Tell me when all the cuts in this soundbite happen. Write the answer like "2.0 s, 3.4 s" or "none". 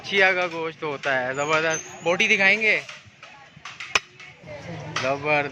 4.6 s